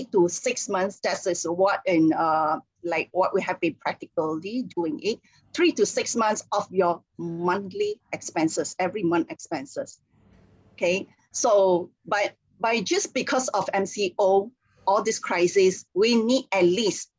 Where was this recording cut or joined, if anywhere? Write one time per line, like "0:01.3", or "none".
none